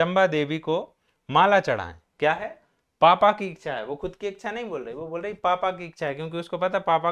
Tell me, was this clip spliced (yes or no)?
no